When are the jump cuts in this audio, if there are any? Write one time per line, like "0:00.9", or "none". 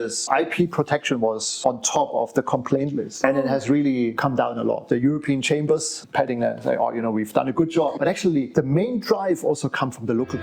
0:04.8
0:05.9
0:08.0